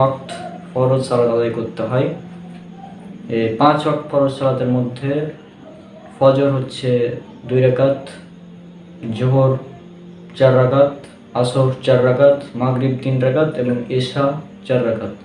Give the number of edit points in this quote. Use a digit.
0